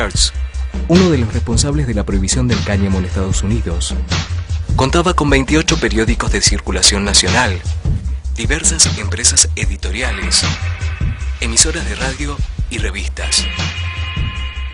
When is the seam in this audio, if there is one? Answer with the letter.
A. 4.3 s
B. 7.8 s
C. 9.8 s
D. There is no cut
A